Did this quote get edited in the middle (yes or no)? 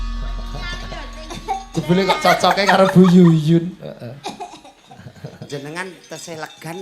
no